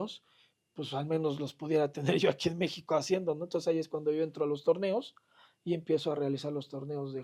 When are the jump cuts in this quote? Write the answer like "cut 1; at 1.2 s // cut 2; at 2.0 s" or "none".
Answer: none